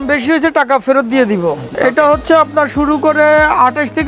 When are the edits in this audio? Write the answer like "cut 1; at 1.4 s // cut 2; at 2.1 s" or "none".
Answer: cut 1; at 1.7 s